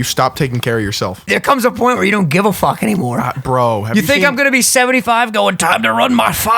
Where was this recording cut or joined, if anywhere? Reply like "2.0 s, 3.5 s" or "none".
1.2 s